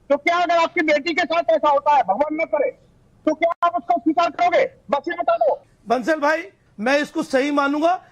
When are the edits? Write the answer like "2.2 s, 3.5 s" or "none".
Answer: 5.7 s